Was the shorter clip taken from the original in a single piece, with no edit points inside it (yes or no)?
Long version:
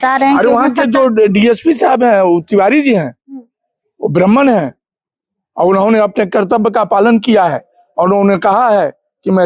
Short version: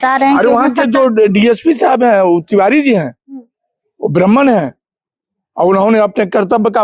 yes